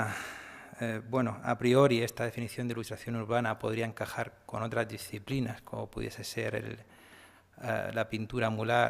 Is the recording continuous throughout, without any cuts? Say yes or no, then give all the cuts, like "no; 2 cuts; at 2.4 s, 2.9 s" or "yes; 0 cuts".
no; 1 cut; at 5.3 s